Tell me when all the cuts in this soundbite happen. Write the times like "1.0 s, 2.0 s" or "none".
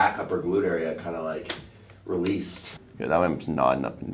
2.6 s